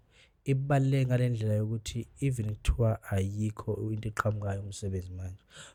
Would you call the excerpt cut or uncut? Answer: uncut